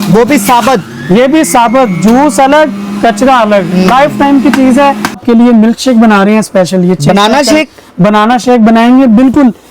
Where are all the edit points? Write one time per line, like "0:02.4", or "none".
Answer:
0:05.2